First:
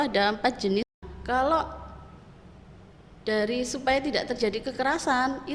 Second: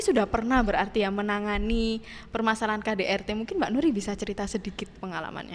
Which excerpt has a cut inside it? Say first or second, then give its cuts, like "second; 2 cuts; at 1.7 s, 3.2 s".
first; 1 cut; at 0.9 s